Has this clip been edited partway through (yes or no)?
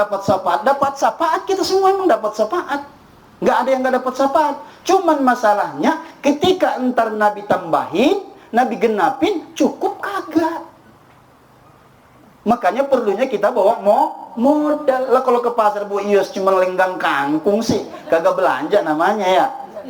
no